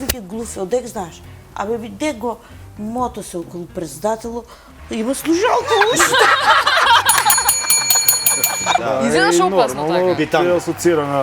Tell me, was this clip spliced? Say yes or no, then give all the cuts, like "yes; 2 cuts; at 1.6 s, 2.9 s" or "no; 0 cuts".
yes; 1 cut; at 8.8 s